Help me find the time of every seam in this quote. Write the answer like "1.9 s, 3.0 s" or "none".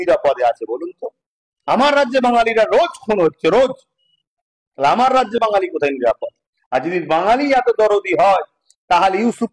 none